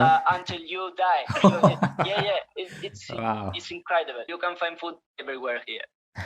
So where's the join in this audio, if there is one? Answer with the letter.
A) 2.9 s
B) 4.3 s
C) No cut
B